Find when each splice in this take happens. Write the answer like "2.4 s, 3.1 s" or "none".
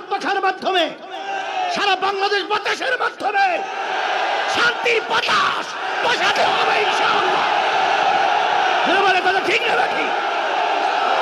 none